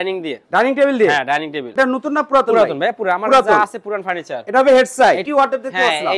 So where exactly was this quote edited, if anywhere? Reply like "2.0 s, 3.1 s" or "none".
1.6 s, 5.3 s